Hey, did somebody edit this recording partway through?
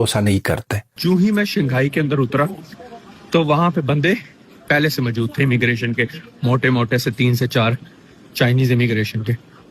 yes; 1 cut; at 1.0 s

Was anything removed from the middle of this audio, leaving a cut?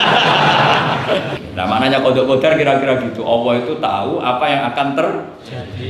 yes; 1 cut; at 1.4 s

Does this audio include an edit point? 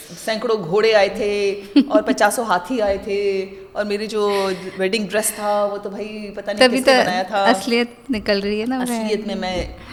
no; 0 cuts

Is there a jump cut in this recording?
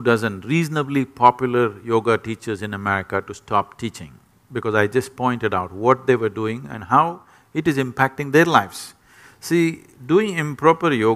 no; 0 cuts

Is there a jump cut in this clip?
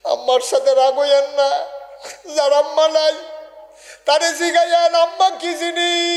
no; 0 cuts

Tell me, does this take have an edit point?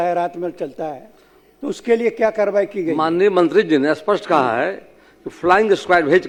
no; 0 cuts

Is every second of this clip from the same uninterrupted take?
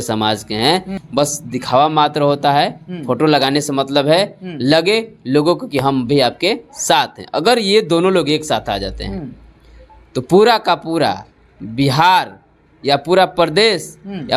no; 1 cut; at 1.0 s

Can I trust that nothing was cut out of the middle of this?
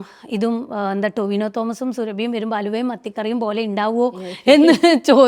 yes; 0 cuts

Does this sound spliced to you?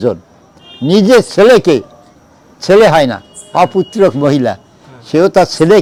no; 0 cuts

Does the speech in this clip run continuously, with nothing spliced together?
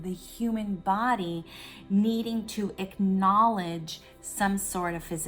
yes; 0 cuts

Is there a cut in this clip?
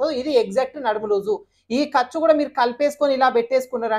no; 0 cuts

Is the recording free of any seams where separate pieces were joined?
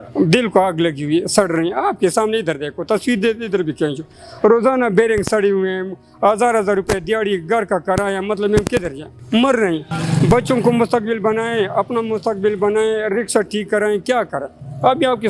yes; 0 cuts

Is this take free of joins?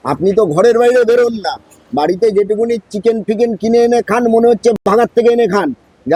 yes; 0 cuts

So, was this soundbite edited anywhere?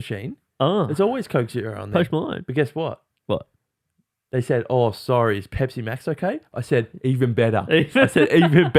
no; 0 cuts

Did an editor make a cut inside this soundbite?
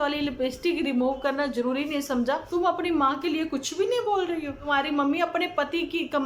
yes; 2 cuts; at 2.4 s, 4.7 s

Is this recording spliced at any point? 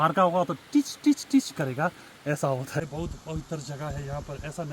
yes; 1 cut; at 2.8 s

